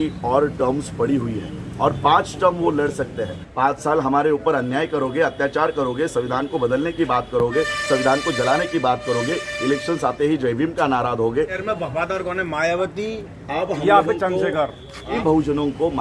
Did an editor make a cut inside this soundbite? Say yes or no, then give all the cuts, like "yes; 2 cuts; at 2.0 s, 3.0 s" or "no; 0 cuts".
yes; 3 cuts; at 3.4 s, 11.6 s, 15.2 s